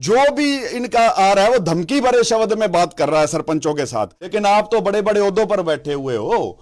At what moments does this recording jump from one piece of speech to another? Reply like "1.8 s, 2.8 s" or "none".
4.2 s